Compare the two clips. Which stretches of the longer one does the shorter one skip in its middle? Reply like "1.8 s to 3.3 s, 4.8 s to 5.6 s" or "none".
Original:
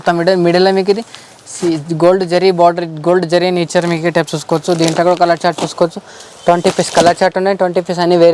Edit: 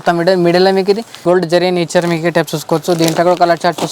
1.1 s to 2.9 s